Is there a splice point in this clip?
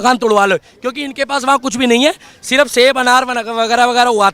no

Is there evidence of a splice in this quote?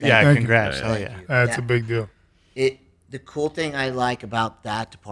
no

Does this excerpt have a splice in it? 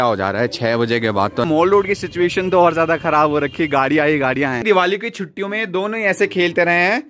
yes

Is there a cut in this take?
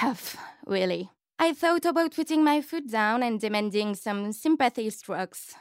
yes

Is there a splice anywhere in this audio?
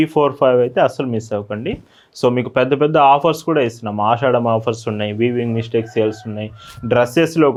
no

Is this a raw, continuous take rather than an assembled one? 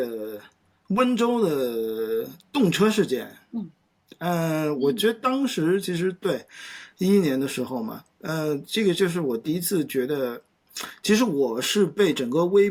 yes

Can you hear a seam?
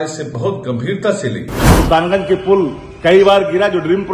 yes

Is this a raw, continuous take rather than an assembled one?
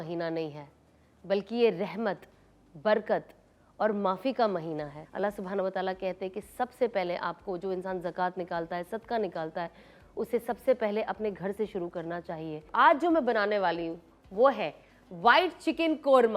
no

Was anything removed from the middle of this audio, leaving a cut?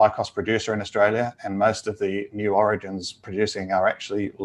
no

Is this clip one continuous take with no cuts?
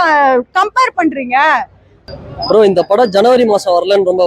no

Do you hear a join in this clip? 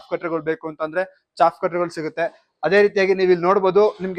no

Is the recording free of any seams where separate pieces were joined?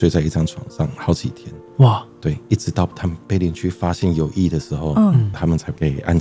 yes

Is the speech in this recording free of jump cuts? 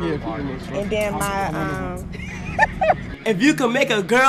yes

